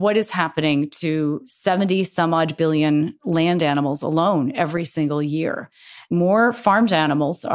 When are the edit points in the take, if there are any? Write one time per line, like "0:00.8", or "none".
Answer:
0:01.5
0:03.2
0:06.1